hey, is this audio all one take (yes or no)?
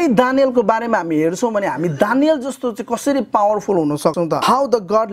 no